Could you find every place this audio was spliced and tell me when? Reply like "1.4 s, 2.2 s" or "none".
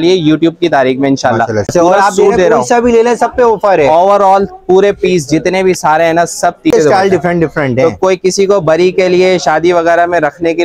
1.7 s, 6.7 s